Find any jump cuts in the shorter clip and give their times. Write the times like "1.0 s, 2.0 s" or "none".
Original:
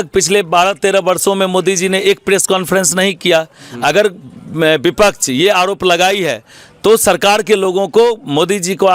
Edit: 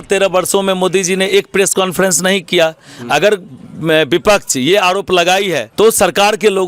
5.6 s